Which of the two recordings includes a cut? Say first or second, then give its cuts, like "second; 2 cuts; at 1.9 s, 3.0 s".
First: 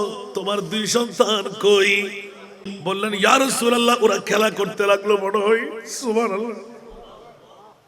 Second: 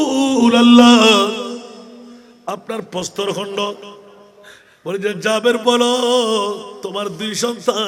first; 1 cut; at 2.6 s